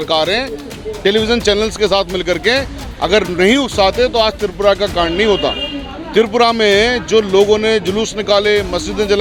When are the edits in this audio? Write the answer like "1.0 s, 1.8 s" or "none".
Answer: none